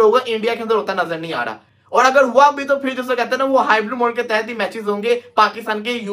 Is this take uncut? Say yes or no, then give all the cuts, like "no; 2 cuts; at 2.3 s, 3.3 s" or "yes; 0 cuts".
yes; 0 cuts